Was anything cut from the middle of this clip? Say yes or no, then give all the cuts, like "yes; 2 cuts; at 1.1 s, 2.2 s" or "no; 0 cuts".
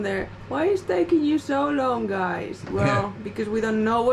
no; 0 cuts